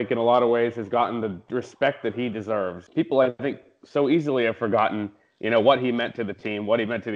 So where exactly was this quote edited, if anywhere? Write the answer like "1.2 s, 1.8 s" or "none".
2.8 s